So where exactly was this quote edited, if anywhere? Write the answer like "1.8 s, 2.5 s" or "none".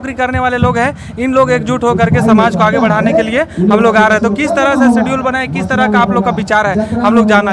none